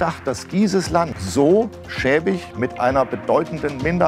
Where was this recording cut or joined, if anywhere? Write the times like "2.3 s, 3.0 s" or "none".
1.2 s